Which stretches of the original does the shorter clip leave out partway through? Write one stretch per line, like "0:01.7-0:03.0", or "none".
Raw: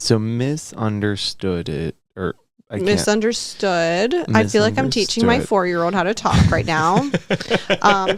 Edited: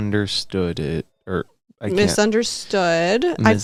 none